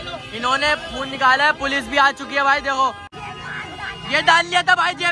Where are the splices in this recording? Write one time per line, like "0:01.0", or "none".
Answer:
0:03.1